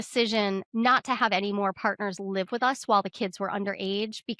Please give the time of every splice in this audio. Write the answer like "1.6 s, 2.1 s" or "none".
none